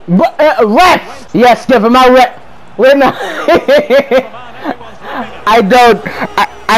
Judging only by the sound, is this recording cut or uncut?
uncut